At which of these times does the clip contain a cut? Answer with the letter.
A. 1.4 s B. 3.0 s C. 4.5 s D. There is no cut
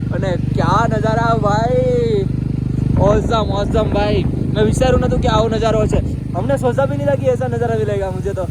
D